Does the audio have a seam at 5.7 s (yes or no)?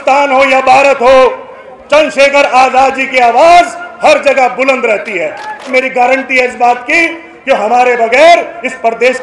yes